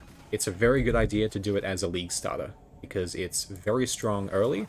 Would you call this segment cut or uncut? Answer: uncut